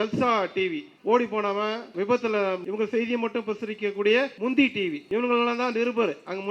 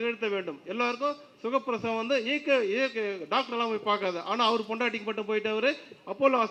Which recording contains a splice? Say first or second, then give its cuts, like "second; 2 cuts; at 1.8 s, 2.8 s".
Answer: first; 5 cuts; at 0.9 s, 1.9 s, 2.6 s, 4.3 s, 5.0 s